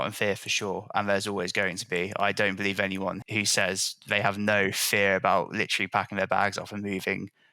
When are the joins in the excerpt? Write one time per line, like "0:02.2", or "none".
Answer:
0:03.2